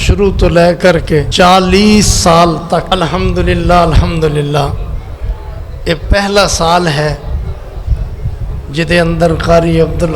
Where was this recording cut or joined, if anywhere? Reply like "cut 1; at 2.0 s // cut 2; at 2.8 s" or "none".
cut 1; at 1.3 s // cut 2; at 2.9 s